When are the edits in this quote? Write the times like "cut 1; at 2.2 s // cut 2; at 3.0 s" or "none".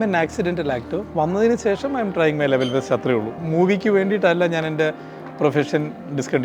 cut 1; at 1.1 s // cut 2; at 3.4 s